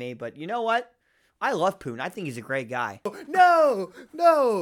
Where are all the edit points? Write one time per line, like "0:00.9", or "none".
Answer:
0:03.2